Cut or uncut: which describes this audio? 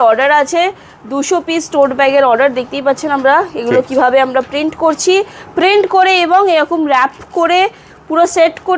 uncut